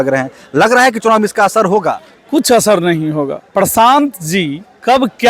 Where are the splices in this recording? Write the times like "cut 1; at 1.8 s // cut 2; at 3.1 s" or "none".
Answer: cut 1; at 3.4 s